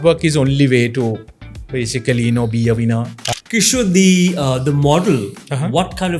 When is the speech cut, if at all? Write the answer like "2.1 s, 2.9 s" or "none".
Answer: 3.2 s